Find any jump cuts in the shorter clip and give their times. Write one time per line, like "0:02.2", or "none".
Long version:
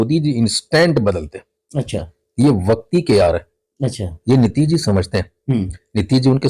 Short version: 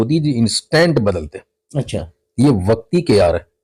none